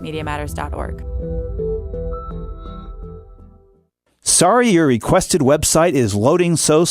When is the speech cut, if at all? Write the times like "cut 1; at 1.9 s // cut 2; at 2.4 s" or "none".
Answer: cut 1; at 3.7 s